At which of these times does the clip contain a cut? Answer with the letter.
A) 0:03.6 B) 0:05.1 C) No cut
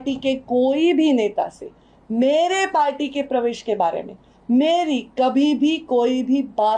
C